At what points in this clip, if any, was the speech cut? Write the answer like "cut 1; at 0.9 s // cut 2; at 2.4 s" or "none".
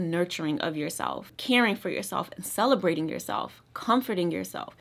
cut 1; at 1.3 s